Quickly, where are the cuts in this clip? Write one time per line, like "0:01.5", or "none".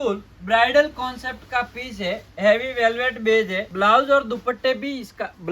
0:03.6